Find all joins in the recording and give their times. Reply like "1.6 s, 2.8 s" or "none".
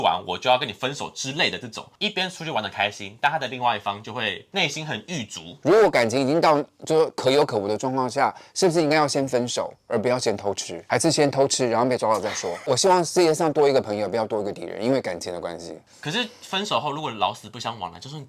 1.9 s, 5.5 s, 12.6 s